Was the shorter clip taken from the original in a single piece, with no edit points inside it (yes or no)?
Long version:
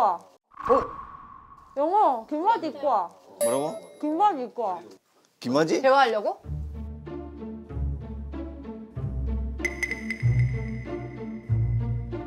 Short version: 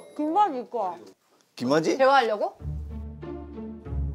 yes